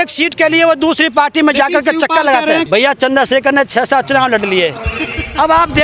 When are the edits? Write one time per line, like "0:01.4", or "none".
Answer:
0:02.7